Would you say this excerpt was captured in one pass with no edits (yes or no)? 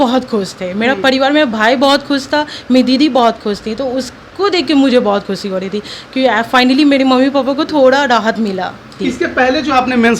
no